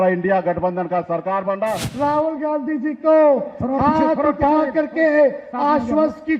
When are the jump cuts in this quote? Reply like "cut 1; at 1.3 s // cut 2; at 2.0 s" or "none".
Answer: cut 1; at 1.9 s